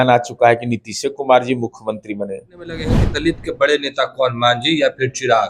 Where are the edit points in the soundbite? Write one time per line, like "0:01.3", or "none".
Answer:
0:03.0